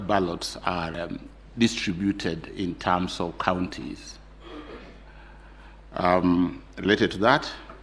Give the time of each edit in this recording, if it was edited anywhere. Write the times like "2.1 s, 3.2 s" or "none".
0.9 s

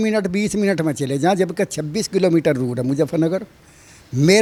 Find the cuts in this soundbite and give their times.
none

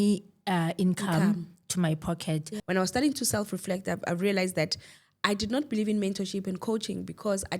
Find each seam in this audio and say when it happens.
2.5 s

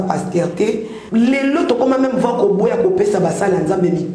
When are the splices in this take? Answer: 0.9 s

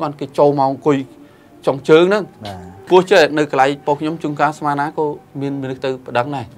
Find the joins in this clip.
2.8 s

